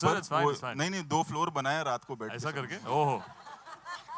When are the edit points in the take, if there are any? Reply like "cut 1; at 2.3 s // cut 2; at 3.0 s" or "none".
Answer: none